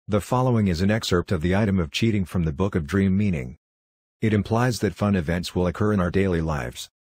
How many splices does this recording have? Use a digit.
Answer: 1